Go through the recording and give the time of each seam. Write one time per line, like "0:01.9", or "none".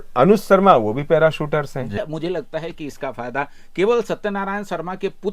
0:02.0